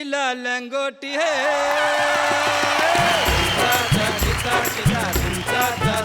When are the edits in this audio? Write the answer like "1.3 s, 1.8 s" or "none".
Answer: 3.4 s

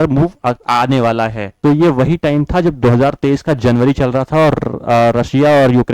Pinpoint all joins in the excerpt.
1.4 s

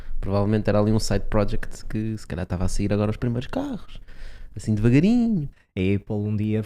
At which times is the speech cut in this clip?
5.6 s

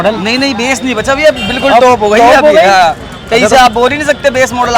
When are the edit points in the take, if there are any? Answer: none

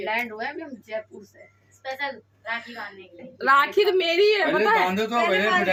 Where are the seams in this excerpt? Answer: none

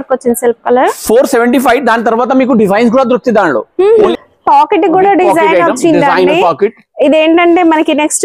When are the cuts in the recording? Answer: 4.1 s

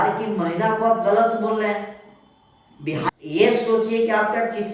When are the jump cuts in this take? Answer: 3.1 s

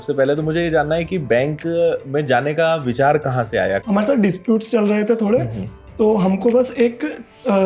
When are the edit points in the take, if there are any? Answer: 3.8 s

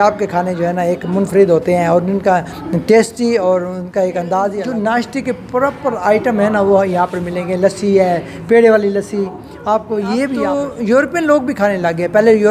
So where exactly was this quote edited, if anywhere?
4.6 s, 10.5 s

